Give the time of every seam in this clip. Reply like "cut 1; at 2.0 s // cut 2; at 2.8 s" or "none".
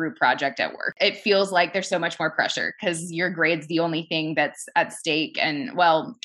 cut 1; at 0.9 s